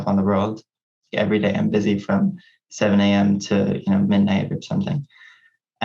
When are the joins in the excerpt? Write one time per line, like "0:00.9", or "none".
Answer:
0:01.0